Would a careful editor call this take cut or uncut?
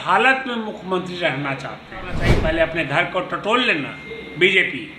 cut